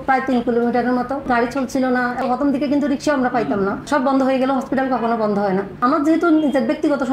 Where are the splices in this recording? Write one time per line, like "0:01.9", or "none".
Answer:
0:01.3
0:02.2
0:03.8
0:05.8